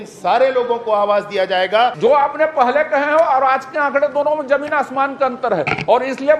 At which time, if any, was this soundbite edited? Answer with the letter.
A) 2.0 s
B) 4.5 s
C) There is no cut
A